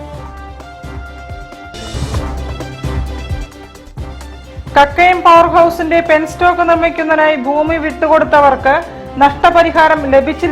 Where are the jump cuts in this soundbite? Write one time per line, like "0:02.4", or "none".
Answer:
0:04.2